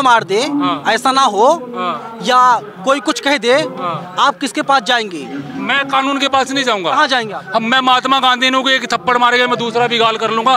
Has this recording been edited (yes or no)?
no